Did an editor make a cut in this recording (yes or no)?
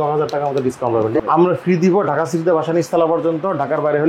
yes